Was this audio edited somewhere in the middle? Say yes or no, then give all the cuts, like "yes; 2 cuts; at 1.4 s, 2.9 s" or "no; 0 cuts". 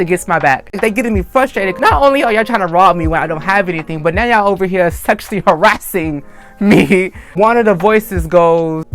yes; 2 cuts; at 0.8 s, 7.2 s